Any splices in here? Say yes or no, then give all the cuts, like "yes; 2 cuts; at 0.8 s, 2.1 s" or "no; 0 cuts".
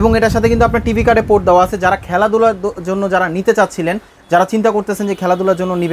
no; 0 cuts